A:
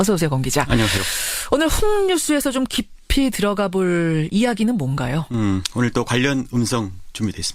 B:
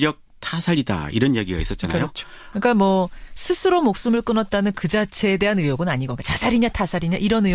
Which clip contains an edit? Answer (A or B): B